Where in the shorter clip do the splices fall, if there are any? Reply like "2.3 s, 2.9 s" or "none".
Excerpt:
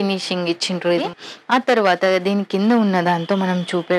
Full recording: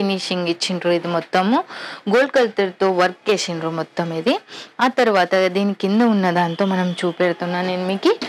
1.1 s